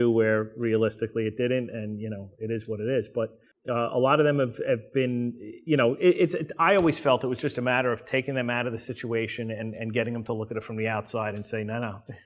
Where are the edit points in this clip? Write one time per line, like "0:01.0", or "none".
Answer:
0:03.5